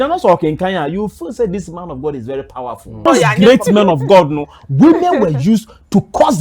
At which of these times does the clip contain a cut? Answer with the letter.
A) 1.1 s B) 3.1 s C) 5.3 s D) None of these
B